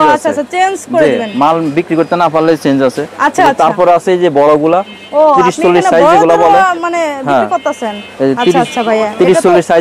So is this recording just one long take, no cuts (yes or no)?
yes